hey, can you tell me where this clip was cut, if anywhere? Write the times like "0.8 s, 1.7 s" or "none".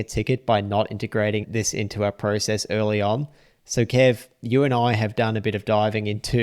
1.5 s